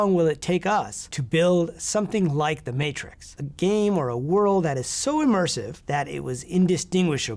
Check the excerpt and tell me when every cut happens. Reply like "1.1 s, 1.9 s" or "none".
3.3 s, 5.7 s